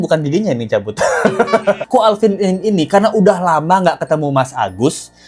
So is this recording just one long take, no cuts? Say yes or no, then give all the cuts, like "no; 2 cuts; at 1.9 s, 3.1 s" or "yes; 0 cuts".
no; 1 cut; at 1.8 s